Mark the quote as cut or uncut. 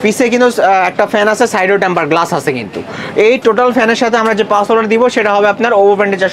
uncut